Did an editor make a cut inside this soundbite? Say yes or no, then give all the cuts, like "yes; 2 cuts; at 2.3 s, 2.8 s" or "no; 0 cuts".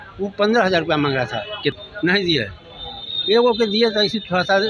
yes; 1 cut; at 1.8 s